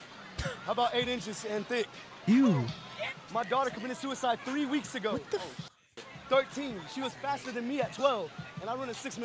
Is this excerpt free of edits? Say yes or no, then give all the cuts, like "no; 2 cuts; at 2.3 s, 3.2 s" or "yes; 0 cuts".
no; 1 cut; at 3.0 s